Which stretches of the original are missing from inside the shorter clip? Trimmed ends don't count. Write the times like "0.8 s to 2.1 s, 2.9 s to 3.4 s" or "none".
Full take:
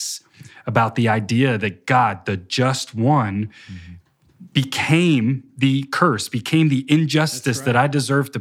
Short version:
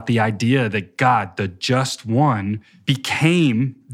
3.6 s to 4.4 s